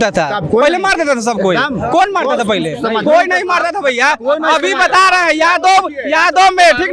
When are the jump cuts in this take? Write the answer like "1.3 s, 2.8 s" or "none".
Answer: none